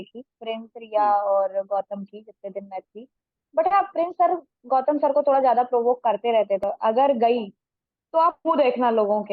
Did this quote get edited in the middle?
yes; 1 cut; at 6.6 s

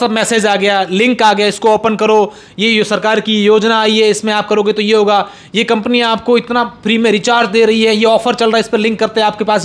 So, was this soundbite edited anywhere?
no; 0 cuts

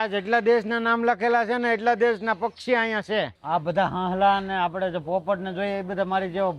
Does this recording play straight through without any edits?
no; 1 cut; at 3.4 s

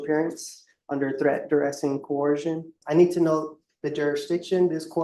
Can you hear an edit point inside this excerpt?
yes; 1 cut; at 2.8 s

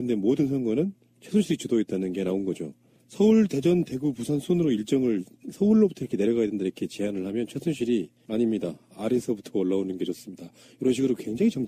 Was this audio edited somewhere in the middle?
no; 0 cuts

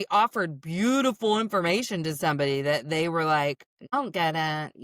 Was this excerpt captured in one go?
no; 1 cut; at 3.7 s

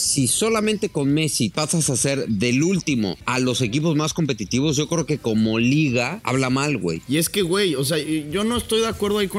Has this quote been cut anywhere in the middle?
yes; 3 cuts; at 1.5 s, 3.2 s, 6.6 s

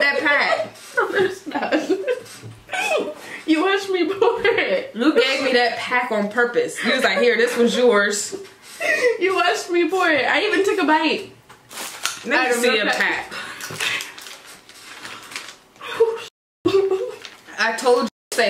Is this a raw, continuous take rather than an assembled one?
yes; 0 cuts

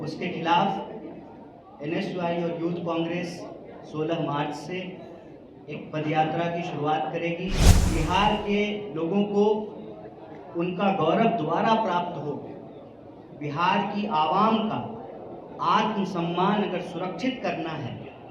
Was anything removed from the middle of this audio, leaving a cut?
yes; 1 cut; at 7.9 s

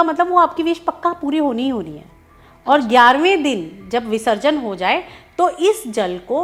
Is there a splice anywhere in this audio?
no; 0 cuts

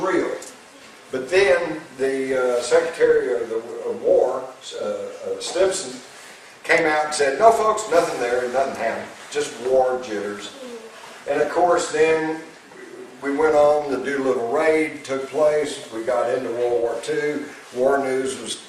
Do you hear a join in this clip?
yes; 1 cut; at 16.3 s

